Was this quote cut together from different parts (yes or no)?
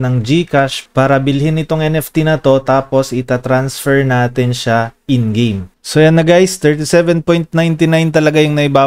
yes